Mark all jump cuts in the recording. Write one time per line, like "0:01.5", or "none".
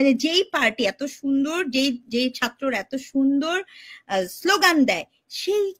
none